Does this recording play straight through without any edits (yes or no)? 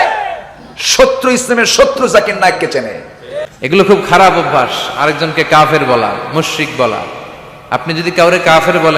no